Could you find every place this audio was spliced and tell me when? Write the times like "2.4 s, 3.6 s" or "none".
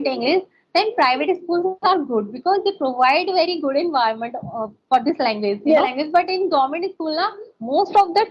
6.0 s